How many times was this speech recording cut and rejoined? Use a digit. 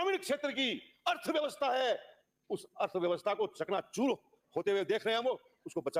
0